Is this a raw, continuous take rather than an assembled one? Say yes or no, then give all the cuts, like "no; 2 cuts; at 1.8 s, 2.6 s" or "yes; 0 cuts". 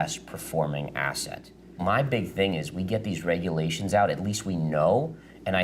no; 1 cut; at 1.8 s